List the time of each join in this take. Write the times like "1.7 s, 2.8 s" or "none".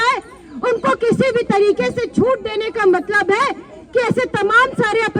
none